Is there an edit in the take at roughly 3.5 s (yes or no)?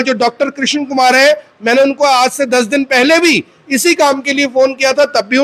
no